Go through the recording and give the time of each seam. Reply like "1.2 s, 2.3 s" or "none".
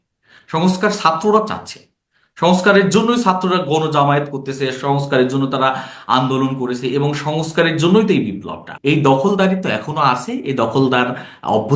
8.7 s